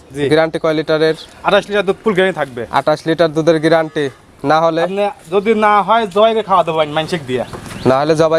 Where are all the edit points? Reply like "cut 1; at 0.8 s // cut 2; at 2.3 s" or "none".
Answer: none